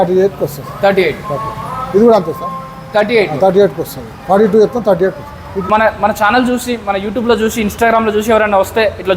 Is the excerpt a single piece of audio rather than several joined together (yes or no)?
no